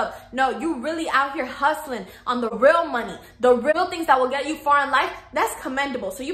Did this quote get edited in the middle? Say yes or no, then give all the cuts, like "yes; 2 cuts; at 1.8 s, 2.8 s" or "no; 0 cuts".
yes; 1 cut; at 2.6 s